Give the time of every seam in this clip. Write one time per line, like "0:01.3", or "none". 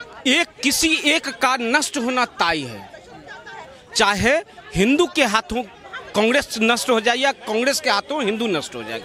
none